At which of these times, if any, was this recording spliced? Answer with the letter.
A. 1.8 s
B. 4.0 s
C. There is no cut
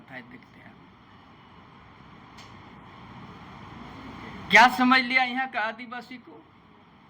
C